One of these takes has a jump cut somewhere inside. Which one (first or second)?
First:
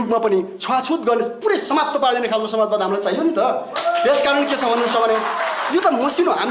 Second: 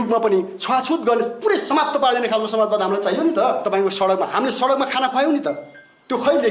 second